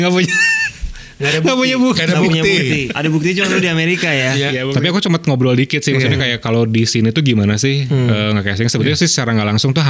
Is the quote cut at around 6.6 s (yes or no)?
no